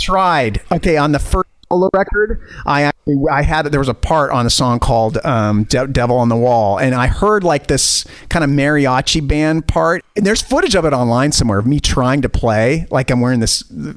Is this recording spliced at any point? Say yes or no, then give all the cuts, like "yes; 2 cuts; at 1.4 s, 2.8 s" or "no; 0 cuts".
yes; 1 cut; at 10.0 s